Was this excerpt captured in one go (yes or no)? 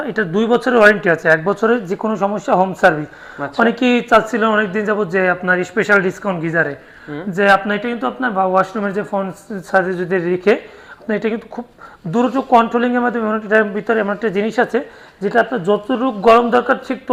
yes